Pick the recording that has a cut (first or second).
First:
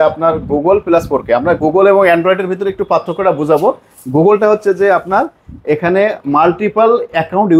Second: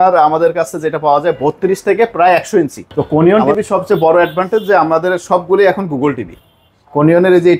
second